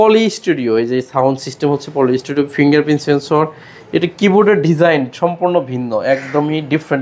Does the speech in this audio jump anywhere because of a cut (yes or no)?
no